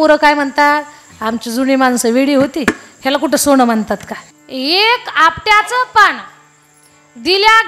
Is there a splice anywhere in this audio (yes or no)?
yes